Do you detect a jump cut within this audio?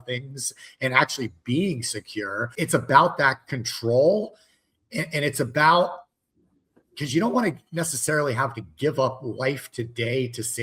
yes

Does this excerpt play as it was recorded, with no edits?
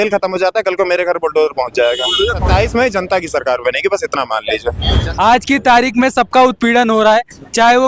no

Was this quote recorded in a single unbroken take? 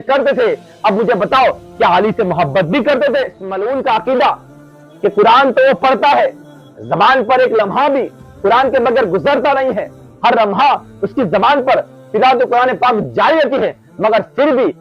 no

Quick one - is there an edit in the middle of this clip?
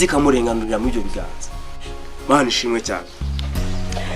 no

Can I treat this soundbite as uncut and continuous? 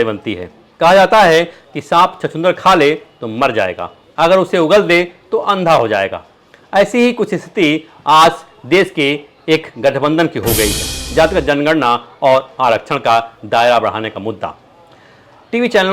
no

